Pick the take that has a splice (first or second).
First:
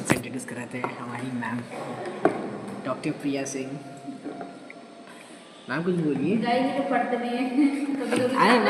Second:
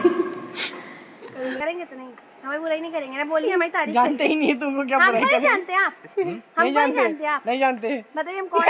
second